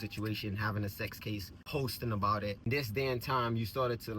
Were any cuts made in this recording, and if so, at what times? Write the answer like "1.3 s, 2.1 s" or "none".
1.5 s, 2.7 s